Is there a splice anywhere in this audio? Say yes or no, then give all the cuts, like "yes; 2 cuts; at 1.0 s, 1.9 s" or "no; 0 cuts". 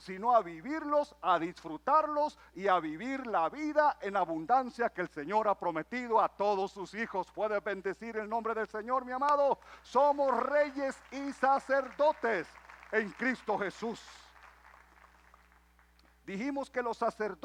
no; 0 cuts